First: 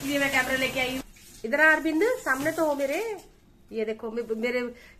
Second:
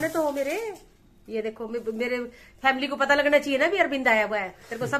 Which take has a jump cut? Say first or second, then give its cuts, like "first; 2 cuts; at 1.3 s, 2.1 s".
first; 1 cut; at 1.0 s